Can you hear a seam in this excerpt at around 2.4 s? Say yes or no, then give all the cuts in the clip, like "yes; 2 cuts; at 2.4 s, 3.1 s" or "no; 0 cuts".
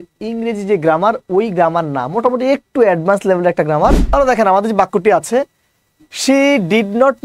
no; 1 cut; at 4.0 s